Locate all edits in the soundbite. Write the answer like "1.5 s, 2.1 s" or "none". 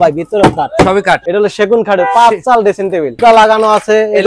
1.2 s, 3.2 s